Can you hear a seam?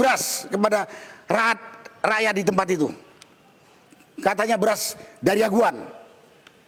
no; 0 cuts

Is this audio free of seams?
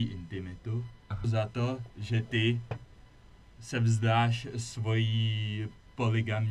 no; 1 cut; at 1.3 s

